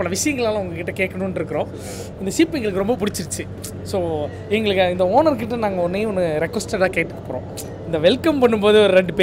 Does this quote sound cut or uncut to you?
uncut